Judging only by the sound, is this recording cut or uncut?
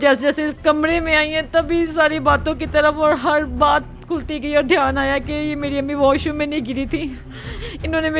uncut